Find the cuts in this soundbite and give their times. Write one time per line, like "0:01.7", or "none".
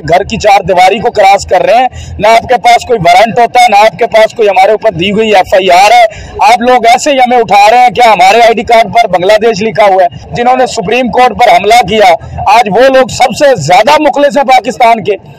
0:10.2